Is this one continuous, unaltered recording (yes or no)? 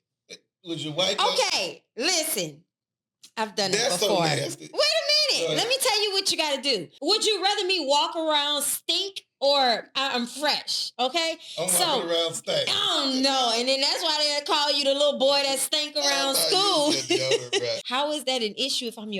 no